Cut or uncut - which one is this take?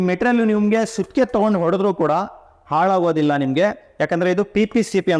uncut